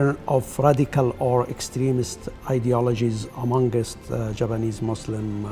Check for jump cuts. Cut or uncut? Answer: uncut